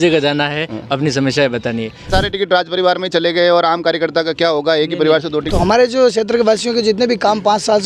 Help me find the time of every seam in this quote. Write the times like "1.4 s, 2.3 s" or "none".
2.0 s, 5.4 s